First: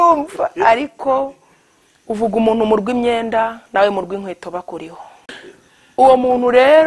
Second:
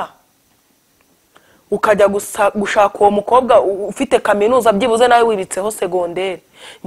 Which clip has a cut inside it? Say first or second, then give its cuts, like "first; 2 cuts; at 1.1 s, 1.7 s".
first; 1 cut; at 5.4 s